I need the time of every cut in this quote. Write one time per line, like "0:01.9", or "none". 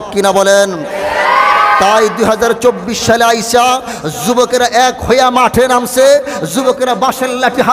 none